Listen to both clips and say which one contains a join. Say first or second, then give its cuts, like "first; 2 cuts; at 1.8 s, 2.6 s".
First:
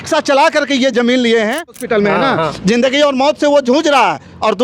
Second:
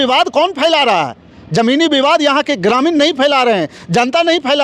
first; 1 cut; at 1.8 s